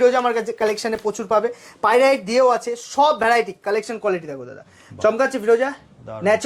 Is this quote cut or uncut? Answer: uncut